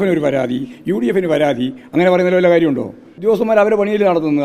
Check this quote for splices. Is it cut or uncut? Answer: cut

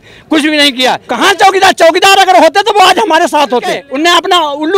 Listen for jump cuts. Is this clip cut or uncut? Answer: cut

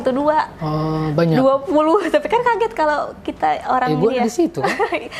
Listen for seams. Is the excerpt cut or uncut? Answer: uncut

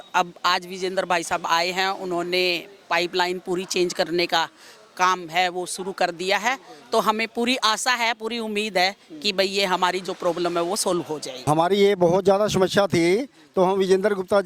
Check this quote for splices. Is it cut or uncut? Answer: cut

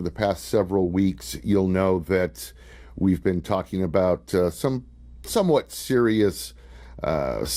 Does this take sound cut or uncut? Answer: uncut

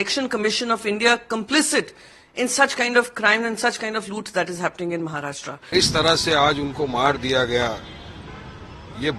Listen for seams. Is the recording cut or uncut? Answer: cut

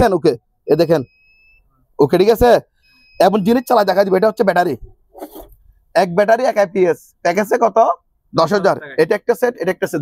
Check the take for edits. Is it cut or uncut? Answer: uncut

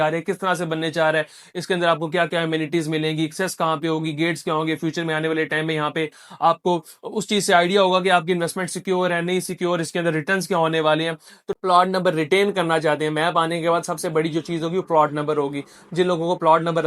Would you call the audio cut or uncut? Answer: cut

